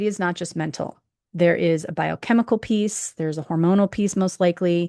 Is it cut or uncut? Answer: uncut